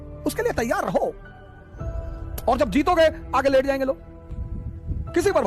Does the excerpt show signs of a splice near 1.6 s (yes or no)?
no